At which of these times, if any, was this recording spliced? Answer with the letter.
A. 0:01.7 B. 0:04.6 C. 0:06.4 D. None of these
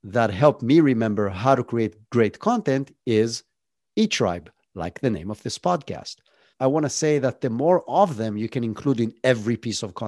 C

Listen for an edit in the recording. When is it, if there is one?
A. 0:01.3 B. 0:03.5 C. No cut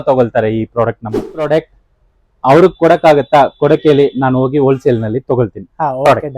A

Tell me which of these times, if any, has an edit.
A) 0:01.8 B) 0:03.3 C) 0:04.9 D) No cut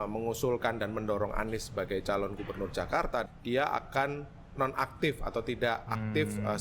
B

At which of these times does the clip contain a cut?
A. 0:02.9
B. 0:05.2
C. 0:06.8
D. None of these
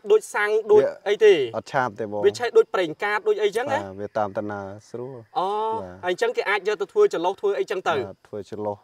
D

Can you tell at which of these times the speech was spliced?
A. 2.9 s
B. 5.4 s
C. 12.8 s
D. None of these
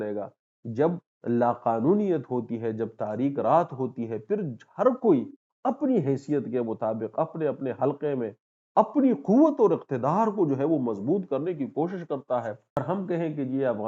C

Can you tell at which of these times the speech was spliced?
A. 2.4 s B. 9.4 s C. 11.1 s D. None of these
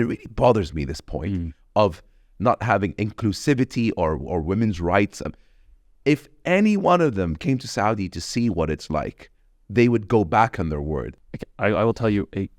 C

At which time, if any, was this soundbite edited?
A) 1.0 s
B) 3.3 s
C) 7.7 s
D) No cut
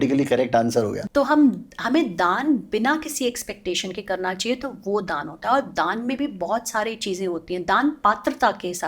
A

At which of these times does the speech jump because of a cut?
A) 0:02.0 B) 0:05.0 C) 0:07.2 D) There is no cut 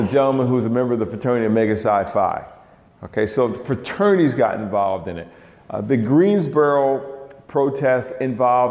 D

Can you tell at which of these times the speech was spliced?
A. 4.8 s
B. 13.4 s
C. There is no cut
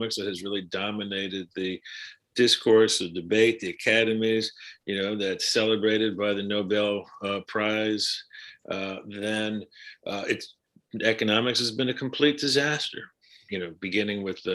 B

